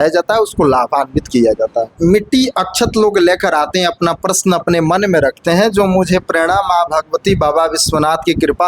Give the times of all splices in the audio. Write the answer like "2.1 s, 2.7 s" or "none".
1.9 s